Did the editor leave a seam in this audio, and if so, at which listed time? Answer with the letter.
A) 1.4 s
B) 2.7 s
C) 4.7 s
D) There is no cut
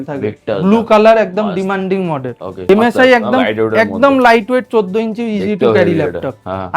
B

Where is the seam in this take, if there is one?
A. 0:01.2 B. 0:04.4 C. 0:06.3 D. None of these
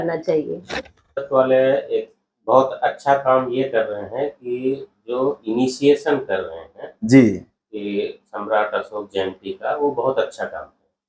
A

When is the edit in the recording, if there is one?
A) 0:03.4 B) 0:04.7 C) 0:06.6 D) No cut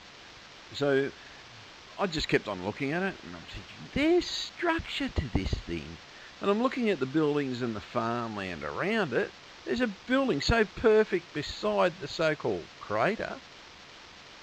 A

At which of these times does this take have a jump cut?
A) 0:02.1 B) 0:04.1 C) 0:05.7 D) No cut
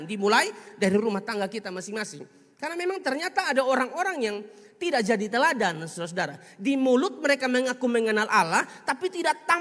D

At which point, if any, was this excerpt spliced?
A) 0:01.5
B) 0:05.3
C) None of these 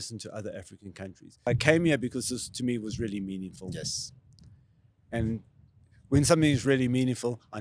A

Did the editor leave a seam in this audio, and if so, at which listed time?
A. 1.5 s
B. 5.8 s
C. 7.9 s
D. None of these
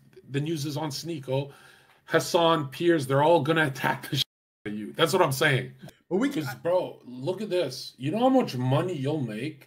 B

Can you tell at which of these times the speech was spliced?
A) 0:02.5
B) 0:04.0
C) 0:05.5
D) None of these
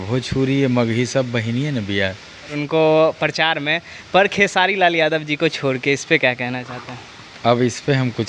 A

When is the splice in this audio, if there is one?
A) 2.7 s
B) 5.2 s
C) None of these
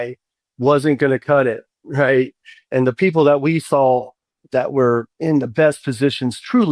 A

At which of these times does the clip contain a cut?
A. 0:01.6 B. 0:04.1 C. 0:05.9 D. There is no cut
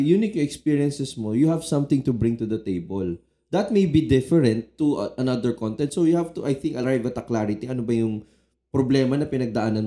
D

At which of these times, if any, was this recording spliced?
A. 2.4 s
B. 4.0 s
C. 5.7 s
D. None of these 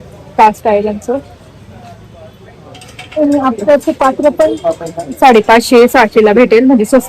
D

